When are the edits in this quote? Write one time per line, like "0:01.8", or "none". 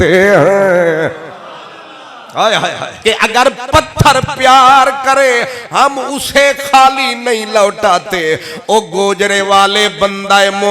0:02.9